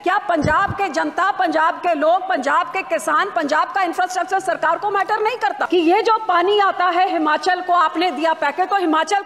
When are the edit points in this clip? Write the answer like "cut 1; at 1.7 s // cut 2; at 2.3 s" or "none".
cut 1; at 5.6 s